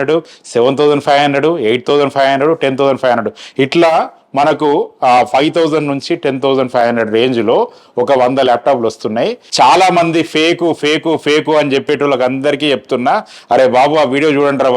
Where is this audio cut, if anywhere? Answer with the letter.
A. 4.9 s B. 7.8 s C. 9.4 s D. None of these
C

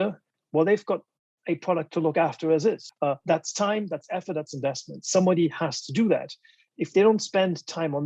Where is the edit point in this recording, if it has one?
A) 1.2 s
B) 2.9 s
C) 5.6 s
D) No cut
B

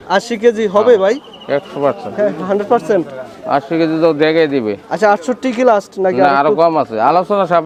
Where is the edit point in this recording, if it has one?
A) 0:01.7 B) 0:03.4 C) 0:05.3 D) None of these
D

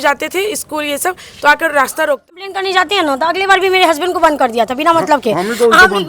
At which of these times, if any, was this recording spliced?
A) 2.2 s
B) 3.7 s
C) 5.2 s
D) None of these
A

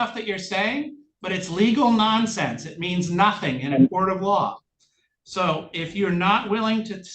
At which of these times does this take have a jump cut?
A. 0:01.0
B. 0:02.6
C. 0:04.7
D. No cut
D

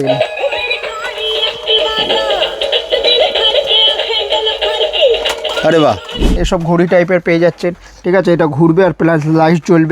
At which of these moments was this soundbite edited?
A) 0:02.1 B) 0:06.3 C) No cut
B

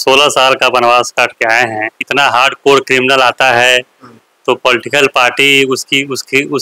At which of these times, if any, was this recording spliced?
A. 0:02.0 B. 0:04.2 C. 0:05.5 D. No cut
A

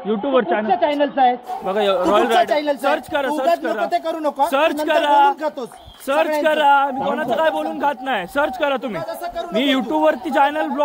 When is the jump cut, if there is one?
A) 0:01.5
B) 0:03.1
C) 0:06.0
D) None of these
D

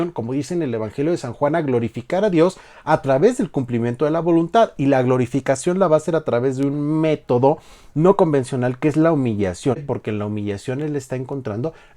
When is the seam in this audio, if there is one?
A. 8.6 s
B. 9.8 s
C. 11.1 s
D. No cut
B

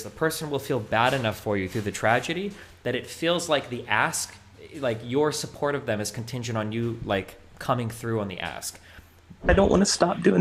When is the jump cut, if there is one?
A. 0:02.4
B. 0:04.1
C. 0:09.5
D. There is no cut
C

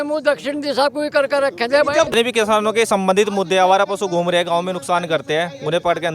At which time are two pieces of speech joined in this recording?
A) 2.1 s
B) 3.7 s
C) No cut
A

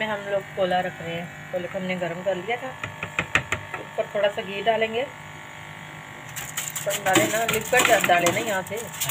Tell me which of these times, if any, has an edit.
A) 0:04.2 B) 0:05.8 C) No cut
C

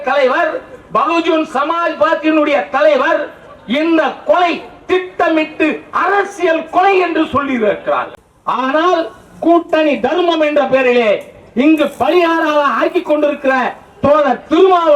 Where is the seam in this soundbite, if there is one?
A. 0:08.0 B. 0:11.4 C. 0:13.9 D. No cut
A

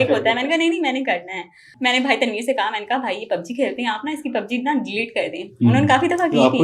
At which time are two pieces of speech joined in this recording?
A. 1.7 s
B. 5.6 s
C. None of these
A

